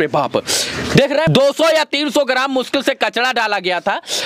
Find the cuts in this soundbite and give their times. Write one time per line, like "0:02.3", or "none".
0:01.3